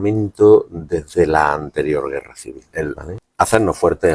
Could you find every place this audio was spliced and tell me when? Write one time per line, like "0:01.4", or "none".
0:02.6